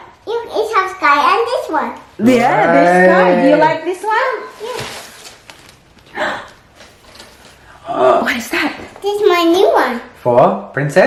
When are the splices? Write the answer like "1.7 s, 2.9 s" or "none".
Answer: none